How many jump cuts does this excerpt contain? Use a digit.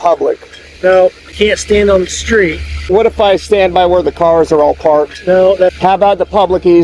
3